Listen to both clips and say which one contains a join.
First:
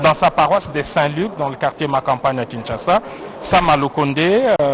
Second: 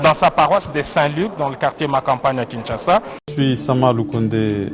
second; 1 cut; at 3.2 s

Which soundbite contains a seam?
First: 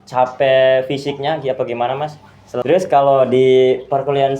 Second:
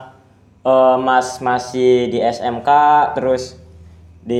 first; 1 cut; at 2.6 s

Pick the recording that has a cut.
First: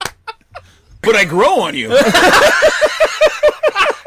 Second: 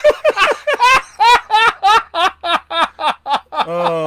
first; 1 cut; at 1.0 s

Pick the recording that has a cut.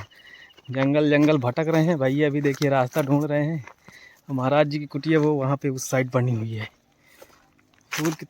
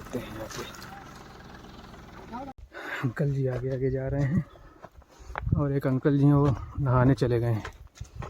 second; 1 cut; at 2.6 s

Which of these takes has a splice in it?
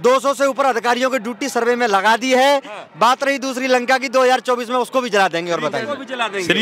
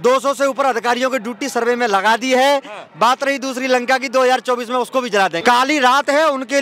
second; 1 cut; at 5.4 s

